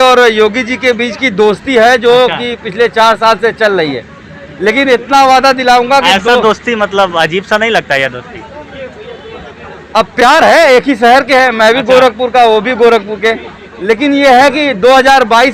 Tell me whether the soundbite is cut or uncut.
uncut